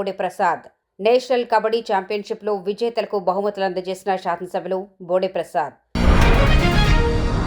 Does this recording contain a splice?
yes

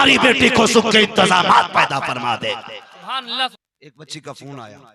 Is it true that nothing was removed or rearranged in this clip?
no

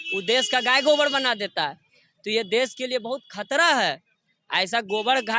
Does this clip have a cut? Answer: no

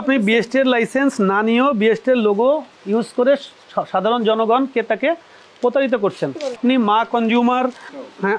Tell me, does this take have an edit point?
yes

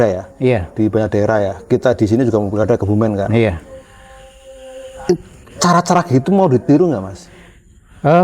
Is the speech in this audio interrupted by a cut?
no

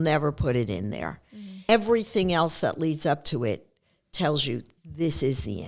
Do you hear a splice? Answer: yes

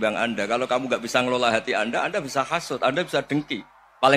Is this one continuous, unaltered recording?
yes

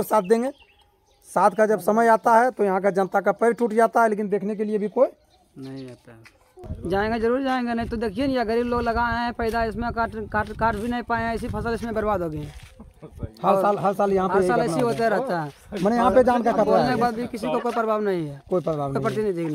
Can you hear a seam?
yes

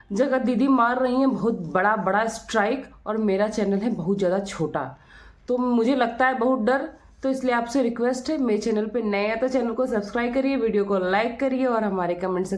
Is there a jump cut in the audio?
no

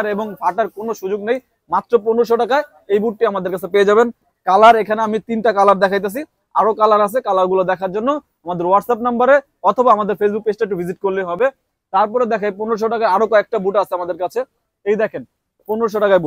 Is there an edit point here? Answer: no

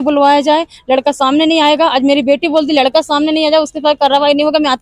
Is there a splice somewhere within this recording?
no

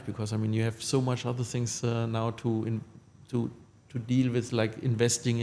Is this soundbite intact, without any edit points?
yes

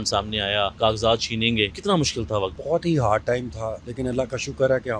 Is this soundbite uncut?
yes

